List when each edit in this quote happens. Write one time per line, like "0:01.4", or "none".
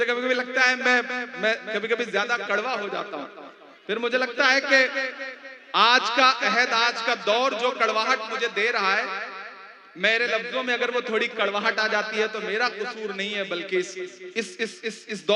none